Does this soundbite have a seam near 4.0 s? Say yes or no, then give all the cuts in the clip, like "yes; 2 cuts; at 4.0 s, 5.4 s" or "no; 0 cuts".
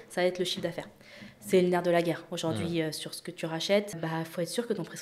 yes; 1 cut; at 4.0 s